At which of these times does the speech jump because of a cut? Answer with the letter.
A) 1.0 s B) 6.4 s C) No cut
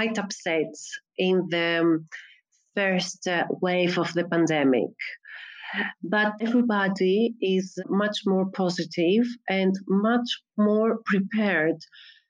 B